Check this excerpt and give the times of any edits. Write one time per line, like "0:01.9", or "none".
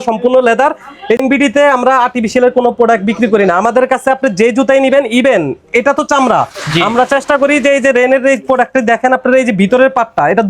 0:01.2